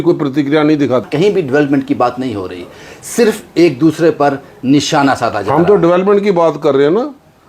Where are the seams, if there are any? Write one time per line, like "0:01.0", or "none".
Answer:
0:01.1